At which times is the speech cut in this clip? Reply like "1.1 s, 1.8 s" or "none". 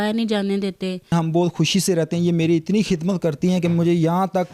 1.1 s